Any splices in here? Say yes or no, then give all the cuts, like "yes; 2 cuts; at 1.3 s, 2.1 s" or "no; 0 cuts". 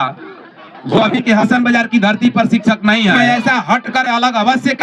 yes; 1 cut; at 3.1 s